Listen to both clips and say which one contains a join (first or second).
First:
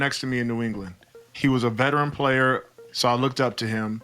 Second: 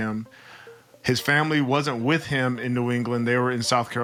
first